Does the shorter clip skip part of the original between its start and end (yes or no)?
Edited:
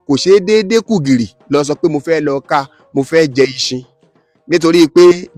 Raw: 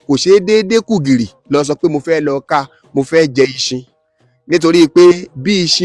no